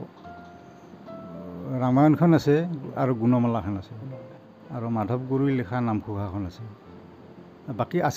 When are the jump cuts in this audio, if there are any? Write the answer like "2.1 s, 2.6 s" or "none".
4.2 s